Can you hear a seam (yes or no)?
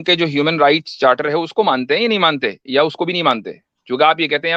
no